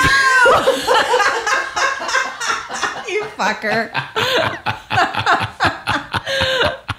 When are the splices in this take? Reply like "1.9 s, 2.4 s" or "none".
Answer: none